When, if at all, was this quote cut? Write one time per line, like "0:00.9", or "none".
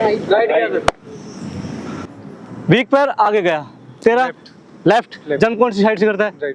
0:02.2